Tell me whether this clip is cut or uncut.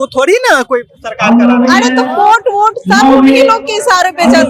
uncut